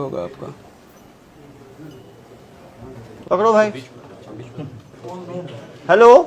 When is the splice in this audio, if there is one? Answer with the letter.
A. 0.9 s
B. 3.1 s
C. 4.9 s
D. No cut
B